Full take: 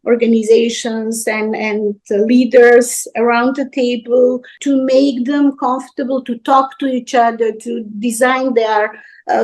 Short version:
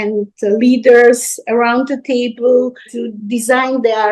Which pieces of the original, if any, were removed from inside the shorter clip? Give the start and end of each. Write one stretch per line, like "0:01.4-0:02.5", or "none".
0:04.5-0:07.6